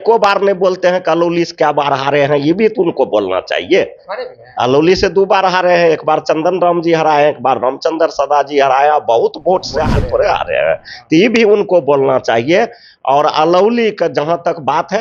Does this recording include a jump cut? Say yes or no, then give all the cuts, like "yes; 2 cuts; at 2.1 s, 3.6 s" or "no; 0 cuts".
yes; 1 cut; at 9.9 s